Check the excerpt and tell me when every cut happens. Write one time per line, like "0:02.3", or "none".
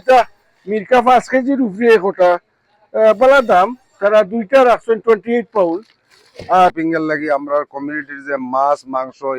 0:06.7